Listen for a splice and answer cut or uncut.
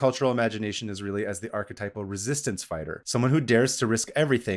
cut